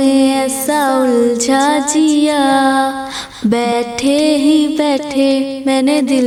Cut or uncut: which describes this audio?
uncut